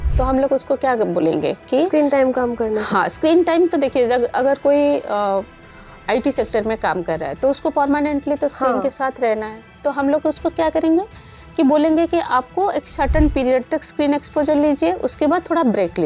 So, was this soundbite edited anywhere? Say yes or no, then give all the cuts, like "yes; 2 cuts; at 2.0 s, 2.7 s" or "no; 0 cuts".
no; 0 cuts